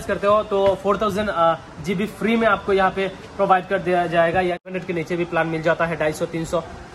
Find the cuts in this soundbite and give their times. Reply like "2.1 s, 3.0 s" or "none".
4.7 s